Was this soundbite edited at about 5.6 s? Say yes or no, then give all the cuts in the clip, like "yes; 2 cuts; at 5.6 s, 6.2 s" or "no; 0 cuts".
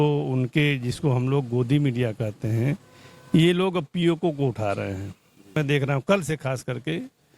yes; 1 cut; at 5.6 s